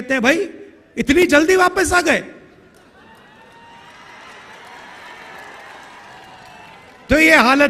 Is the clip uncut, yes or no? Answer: yes